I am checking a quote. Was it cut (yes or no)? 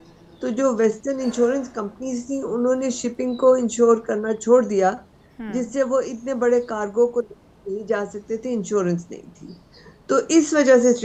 no